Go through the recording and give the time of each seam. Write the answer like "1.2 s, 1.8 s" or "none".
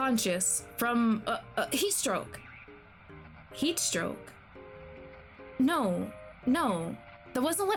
none